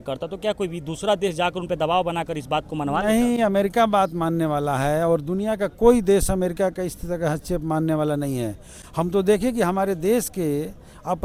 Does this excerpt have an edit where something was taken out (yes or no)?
no